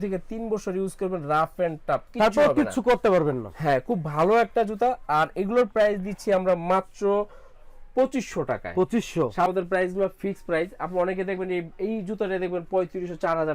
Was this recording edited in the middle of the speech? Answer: no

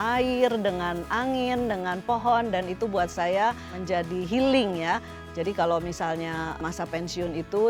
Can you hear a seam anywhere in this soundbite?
yes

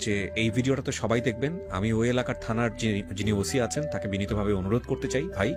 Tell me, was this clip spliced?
no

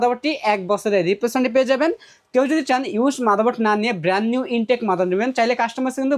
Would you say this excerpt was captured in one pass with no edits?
yes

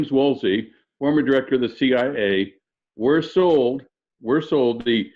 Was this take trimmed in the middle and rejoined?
no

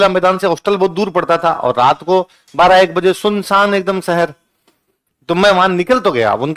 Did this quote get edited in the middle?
no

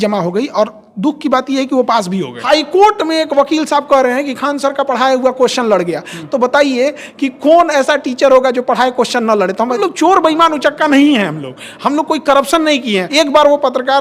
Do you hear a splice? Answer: yes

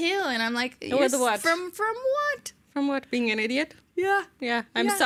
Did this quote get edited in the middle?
no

